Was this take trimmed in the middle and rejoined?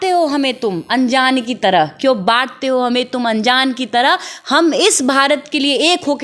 no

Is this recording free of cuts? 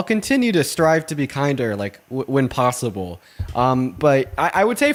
yes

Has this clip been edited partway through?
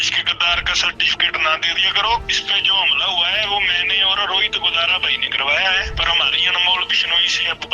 yes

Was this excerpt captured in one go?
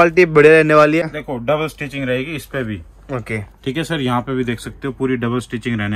no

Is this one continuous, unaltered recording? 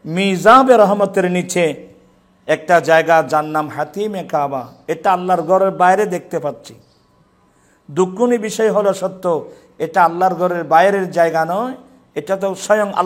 yes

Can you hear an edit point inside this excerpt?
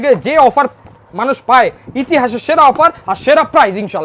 no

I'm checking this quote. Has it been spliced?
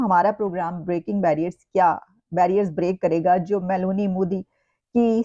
no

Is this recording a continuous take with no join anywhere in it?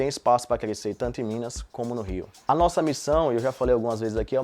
no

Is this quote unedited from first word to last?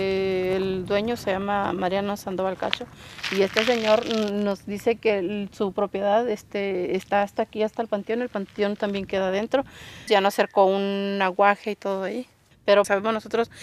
no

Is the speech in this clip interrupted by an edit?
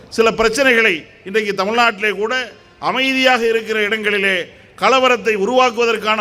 no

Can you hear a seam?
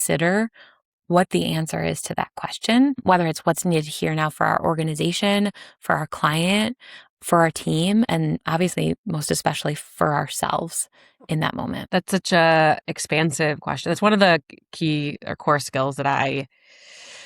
yes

